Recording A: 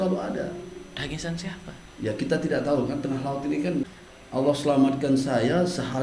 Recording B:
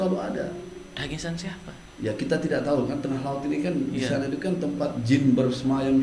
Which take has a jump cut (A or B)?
A